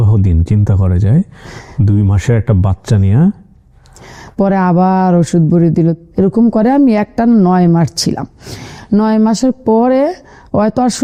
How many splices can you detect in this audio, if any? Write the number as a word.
zero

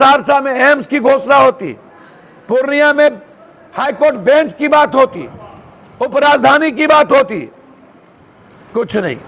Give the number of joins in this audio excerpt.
zero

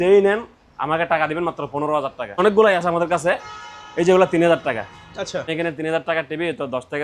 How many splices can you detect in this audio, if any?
two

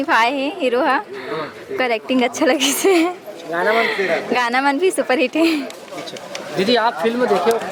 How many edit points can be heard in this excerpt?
zero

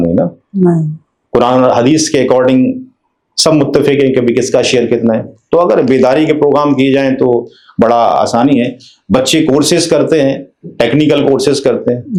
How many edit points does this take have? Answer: zero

